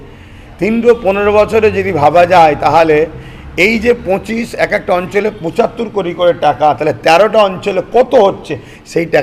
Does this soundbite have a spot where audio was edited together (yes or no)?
no